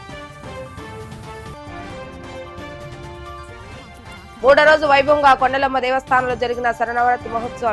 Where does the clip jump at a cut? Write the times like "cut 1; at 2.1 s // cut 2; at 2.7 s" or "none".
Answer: cut 1; at 4.4 s